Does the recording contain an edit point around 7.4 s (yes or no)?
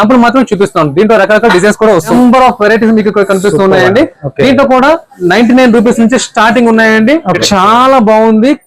yes